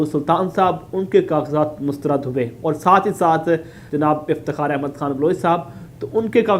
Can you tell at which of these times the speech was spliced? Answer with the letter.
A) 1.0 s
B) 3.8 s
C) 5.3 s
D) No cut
B